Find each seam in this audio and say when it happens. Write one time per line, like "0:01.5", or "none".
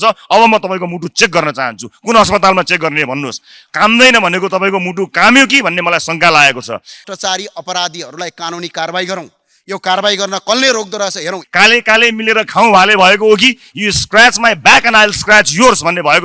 0:07.0
0:11.4